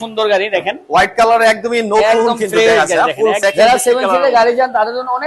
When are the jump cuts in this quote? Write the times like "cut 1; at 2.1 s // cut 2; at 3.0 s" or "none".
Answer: cut 1; at 3.4 s